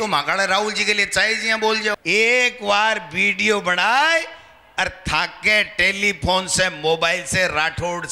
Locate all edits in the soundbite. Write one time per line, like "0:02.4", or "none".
0:01.9